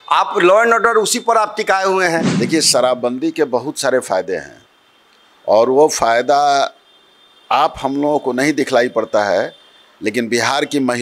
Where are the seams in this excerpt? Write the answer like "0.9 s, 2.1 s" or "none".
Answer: 2.3 s